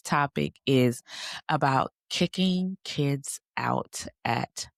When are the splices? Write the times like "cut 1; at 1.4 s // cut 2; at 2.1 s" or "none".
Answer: none